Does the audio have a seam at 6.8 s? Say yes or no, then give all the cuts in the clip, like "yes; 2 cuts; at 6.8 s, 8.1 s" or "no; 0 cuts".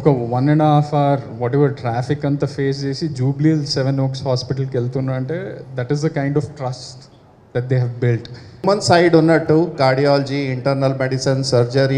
no; 1 cut; at 8.6 s